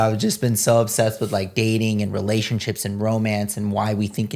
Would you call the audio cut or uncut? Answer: uncut